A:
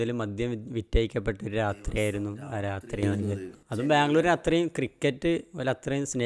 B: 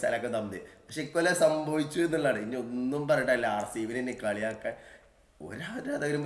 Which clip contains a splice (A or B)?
A